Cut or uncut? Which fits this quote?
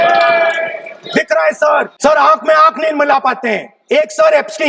cut